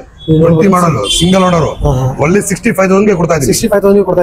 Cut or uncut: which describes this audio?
uncut